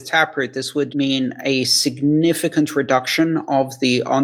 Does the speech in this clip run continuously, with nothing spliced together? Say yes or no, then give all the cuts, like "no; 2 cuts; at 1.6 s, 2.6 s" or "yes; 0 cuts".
no; 1 cut; at 0.9 s